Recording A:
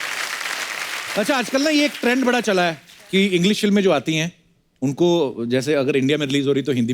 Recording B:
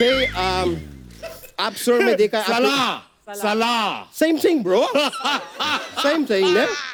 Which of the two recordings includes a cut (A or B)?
A